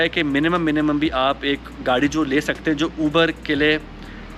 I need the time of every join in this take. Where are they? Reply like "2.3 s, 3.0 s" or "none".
none